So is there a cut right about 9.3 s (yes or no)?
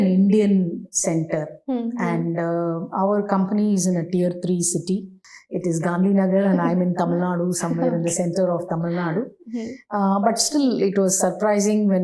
no